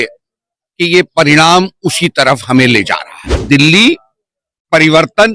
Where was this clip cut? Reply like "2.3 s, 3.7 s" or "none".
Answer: 3.4 s